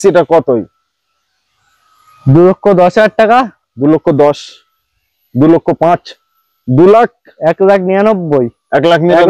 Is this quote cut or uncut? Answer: uncut